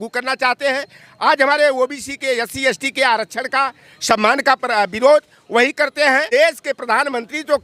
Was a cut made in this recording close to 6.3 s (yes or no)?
yes